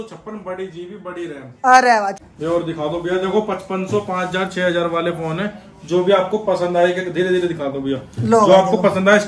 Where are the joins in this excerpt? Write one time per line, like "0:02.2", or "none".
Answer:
0:02.2